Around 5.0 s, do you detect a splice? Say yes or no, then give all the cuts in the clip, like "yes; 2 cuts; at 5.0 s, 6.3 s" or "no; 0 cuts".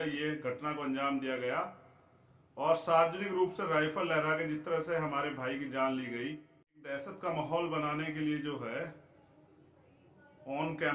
no; 1 cut; at 6.8 s